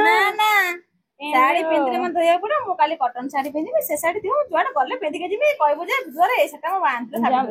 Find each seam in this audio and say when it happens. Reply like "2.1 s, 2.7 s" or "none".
none

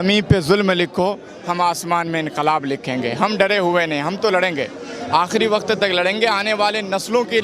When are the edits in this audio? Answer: none

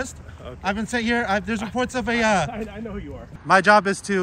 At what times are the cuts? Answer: 3.2 s

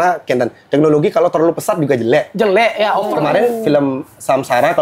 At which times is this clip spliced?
3.1 s

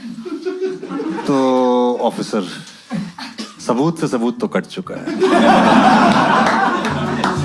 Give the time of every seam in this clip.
none

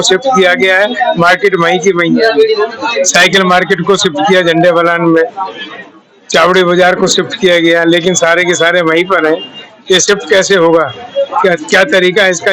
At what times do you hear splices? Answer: none

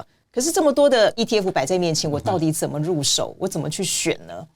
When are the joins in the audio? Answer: none

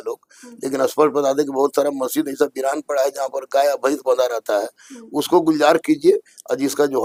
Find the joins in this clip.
none

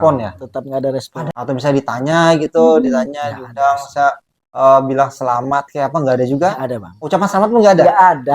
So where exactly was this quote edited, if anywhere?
1.2 s

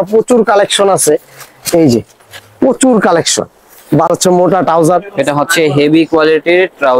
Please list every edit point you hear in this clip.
4.1 s

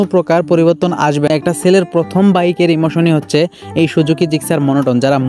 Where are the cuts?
1.3 s

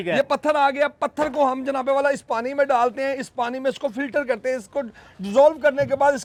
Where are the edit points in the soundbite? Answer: none

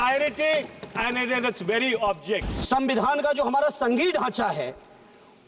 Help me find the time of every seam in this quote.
2.5 s

